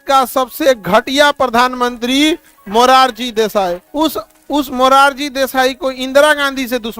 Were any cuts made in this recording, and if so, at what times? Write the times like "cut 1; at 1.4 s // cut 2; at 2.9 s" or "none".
cut 1; at 3.8 s